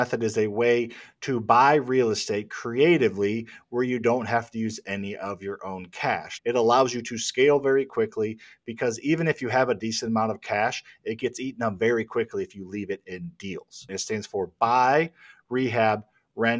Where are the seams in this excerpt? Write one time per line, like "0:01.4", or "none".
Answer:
0:06.3
0:13.8